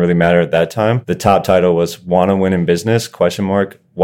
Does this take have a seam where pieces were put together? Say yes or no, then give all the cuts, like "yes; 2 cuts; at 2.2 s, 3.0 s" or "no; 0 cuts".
yes; 1 cut; at 1.1 s